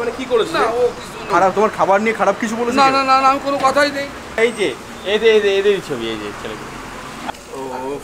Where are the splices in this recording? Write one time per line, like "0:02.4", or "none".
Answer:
0:01.3
0:04.4
0:07.1